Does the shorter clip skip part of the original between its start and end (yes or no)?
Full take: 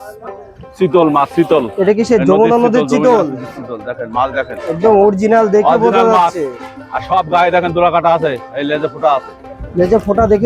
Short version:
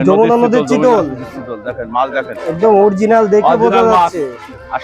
no